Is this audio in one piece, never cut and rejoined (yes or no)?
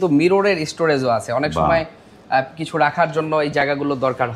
yes